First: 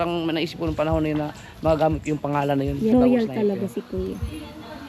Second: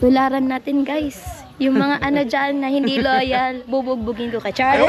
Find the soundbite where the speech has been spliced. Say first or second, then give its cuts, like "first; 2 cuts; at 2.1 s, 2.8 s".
first; 1 cut; at 2.9 s